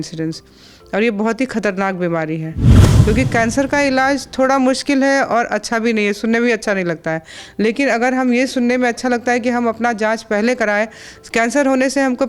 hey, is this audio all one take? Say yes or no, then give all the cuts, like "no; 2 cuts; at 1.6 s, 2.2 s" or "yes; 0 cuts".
no; 1 cut; at 2.9 s